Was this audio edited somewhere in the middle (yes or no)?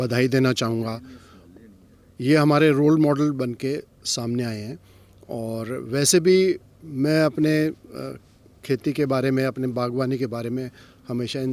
no